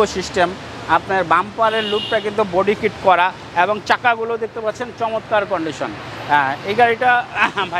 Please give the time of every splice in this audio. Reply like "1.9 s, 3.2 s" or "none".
none